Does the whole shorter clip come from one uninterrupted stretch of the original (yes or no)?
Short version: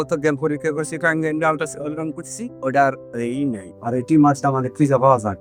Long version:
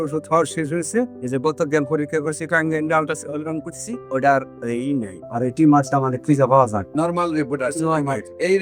yes